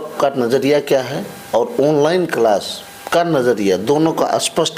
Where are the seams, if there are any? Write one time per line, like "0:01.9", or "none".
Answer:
none